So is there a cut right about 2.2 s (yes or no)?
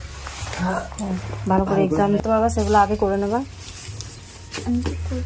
yes